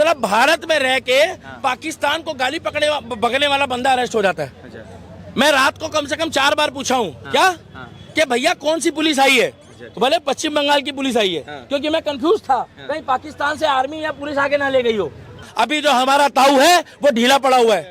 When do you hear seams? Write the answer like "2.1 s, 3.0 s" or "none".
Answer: 15.4 s